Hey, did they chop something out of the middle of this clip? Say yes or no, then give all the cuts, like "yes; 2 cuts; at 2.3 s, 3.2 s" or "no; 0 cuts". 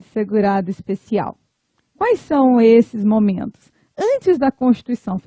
yes; 1 cut; at 1.8 s